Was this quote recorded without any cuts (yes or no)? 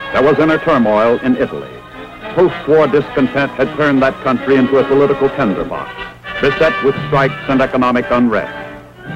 yes